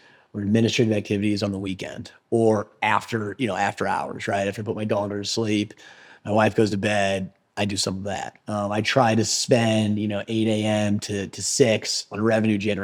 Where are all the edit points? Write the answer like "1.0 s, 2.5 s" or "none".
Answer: none